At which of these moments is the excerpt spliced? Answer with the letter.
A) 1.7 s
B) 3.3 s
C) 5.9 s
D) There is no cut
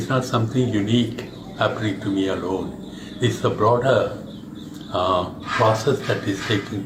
D